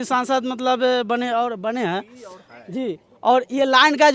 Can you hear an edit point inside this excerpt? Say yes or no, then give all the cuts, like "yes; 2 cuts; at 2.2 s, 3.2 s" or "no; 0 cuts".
no; 0 cuts